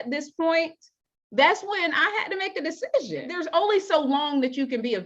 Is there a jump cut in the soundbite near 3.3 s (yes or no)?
yes